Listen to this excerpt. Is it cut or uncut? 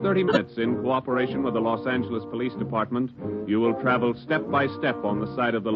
cut